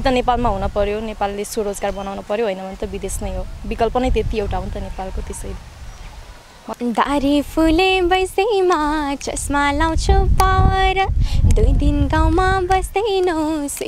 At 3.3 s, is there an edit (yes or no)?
no